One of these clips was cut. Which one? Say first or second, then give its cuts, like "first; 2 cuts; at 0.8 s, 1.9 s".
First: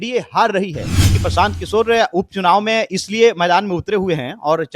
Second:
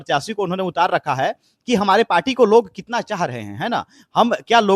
first; 1 cut; at 1.1 s